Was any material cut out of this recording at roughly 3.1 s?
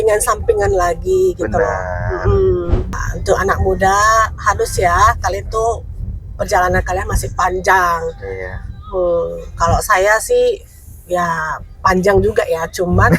yes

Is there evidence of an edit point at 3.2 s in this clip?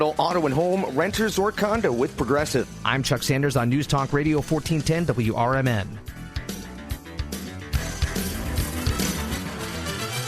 no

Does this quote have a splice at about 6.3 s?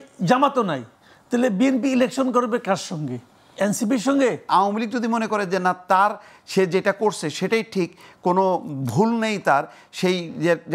no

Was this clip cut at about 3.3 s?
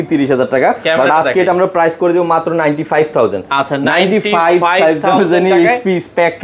no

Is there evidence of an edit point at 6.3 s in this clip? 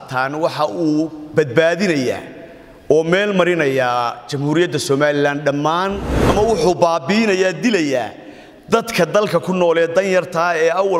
yes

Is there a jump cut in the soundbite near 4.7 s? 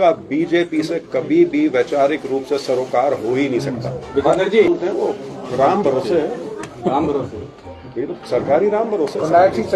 yes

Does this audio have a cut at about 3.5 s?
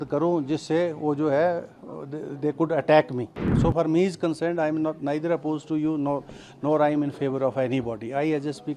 yes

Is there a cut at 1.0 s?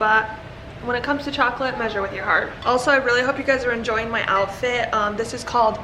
no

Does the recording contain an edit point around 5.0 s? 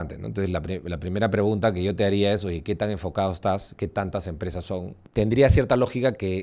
yes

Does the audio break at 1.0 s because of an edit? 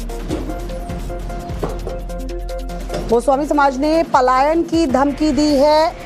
yes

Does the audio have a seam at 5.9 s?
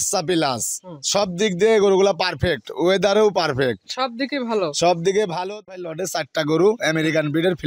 yes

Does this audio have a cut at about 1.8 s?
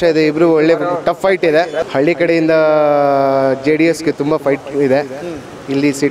yes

